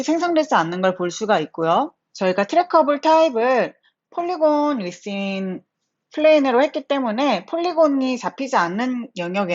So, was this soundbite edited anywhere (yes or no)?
yes